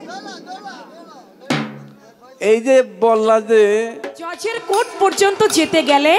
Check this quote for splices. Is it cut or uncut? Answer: cut